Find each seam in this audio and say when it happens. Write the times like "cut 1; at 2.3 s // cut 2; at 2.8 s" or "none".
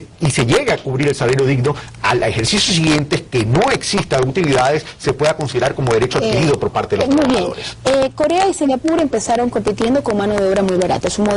cut 1; at 3.0 s

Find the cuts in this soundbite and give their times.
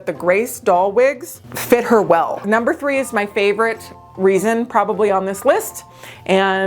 cut 1; at 2.4 s

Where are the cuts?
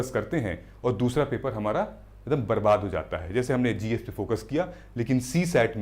none

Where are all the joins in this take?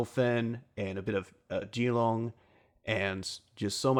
none

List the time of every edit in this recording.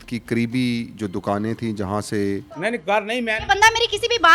cut 1; at 2.5 s

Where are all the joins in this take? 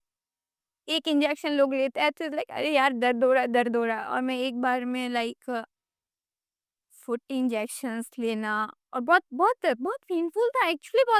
none

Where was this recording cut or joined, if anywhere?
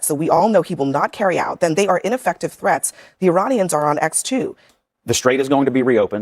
cut 1; at 4.6 s

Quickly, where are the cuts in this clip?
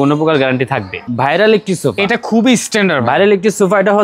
cut 1; at 1.0 s

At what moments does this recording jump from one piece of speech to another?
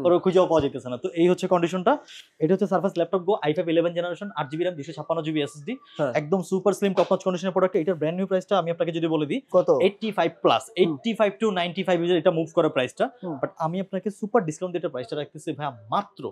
none

